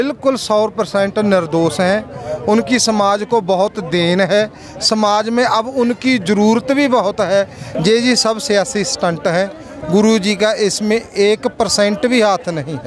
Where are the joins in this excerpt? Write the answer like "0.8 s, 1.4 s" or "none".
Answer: 7.6 s

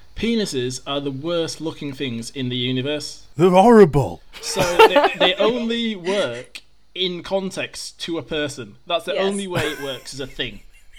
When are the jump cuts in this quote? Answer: none

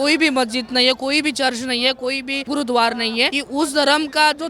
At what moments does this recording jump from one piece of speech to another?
2.4 s, 3.4 s

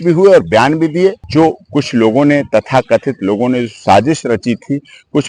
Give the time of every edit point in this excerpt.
1.2 s

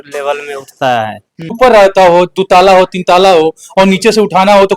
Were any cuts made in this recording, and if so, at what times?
1.5 s

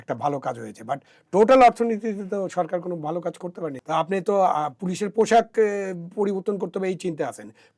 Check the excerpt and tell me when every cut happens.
3.7 s

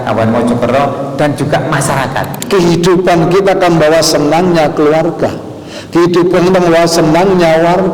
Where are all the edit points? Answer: 2.4 s

